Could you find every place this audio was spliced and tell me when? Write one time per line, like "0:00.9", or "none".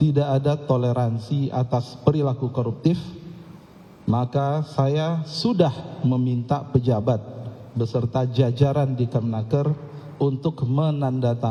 none